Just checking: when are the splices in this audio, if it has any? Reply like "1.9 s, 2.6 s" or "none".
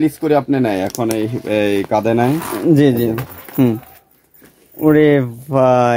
none